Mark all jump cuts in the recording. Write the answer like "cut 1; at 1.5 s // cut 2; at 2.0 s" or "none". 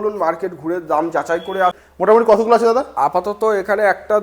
cut 1; at 1.8 s